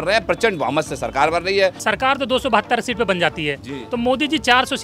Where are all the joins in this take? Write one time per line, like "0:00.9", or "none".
0:01.8